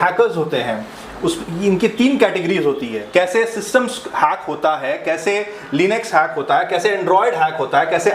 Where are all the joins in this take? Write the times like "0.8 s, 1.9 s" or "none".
3.0 s